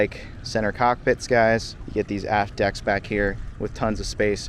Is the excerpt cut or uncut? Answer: cut